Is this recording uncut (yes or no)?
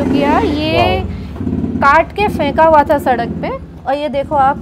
yes